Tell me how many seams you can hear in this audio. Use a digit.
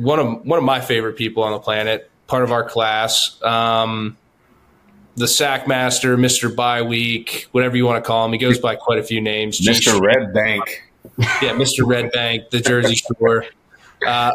0